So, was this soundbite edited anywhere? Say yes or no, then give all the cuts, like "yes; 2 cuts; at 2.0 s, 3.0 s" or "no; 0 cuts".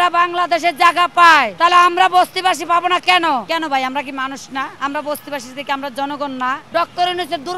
yes; 4 cuts; at 1.5 s, 3.4 s, 4.7 s, 6.6 s